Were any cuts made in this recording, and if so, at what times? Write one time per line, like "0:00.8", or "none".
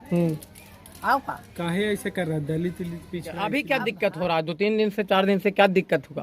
0:03.4